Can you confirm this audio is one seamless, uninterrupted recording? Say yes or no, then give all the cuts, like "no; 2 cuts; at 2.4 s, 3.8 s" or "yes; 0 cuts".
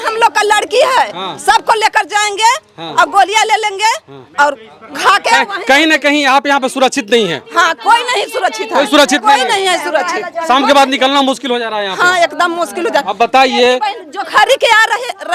yes; 0 cuts